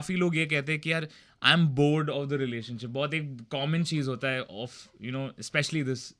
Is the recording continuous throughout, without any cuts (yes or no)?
yes